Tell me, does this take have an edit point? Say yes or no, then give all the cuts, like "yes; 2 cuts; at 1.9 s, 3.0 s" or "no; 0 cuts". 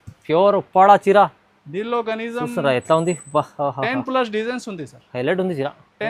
no; 0 cuts